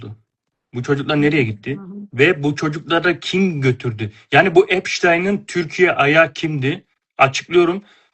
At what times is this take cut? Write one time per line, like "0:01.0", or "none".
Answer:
none